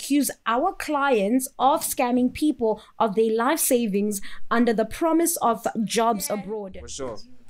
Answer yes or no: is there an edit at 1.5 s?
no